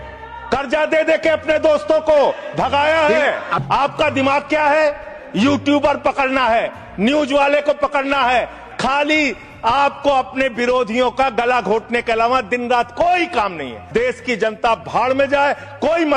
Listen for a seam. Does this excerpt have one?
yes; 3 cuts; at 3.5 s, 8.6 s, 13.8 s

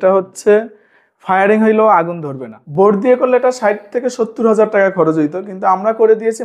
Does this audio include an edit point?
yes; 1 cut; at 2.6 s

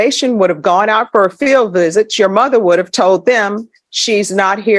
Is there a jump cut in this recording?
no; 0 cuts

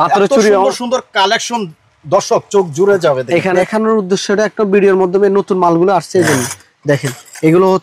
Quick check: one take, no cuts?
no; 1 cut; at 3.5 s

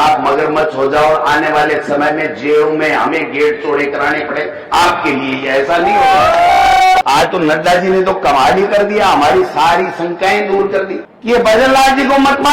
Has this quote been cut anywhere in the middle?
yes; 2 cuts; at 7.0 s, 11.1 s

